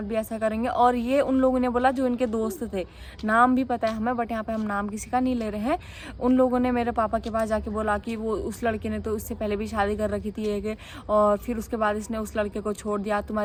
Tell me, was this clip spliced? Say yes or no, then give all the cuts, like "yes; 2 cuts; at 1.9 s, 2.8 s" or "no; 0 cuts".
no; 0 cuts